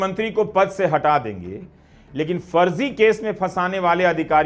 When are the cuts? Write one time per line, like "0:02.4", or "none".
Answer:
none